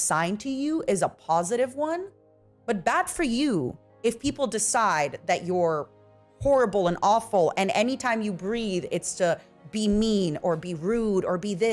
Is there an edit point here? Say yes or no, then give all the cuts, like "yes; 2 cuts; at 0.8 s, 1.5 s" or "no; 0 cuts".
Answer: yes; 1 cut; at 2.5 s